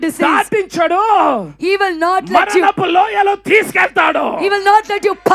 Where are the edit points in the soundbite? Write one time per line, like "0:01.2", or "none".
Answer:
none

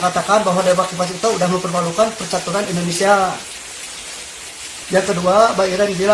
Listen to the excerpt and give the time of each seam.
none

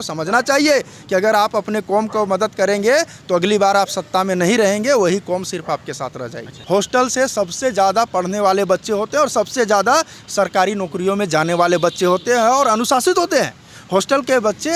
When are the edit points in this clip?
0:06.5

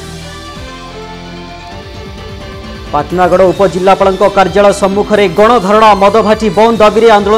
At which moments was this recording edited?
0:02.7

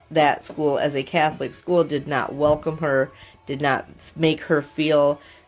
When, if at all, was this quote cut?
none

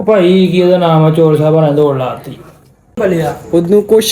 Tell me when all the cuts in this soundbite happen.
0:03.0

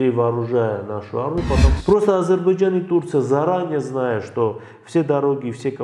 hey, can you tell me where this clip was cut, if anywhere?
0:01.7

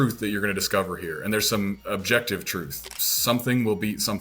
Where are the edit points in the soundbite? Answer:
0:01.8
0:02.8

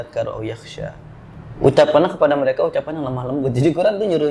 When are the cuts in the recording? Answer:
none

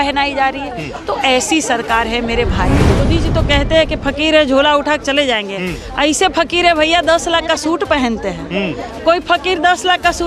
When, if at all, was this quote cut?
0:03.0

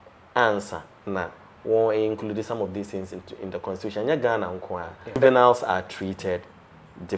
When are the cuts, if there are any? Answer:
0:05.2

